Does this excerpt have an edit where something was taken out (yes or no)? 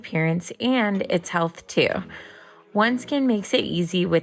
no